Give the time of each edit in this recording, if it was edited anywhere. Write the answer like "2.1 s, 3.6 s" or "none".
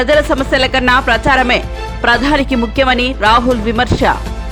none